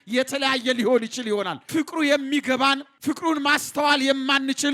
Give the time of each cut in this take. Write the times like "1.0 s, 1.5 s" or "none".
1.6 s, 2.9 s

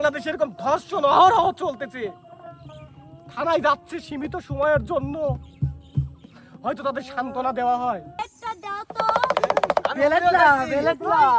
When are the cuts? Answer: 8.2 s

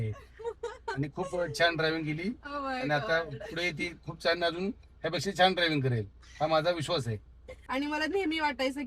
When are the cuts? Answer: 7.5 s

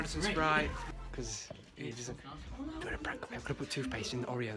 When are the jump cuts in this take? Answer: 0.9 s

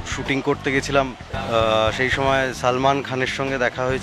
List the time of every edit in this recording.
1.3 s

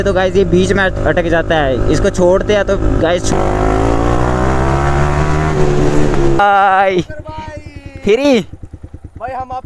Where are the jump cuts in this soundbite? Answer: 3.3 s, 6.4 s

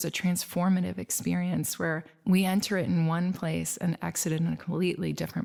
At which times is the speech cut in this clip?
none

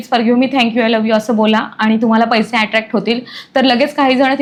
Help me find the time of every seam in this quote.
none

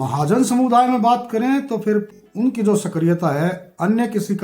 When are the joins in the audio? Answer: 2.2 s

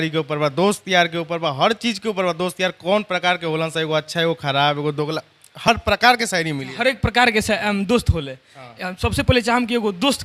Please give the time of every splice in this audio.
none

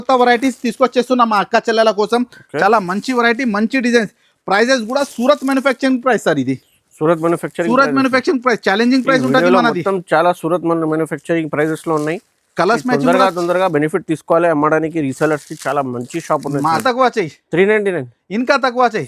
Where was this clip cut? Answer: 16.8 s

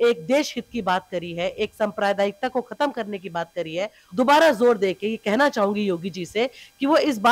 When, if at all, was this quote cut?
4.0 s

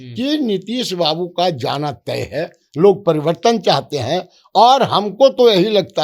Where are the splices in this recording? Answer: none

